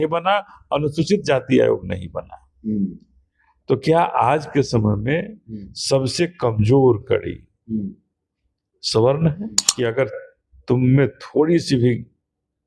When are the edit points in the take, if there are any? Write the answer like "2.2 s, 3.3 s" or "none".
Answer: 9.6 s